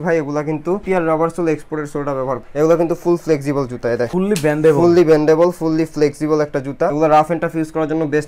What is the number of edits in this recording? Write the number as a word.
three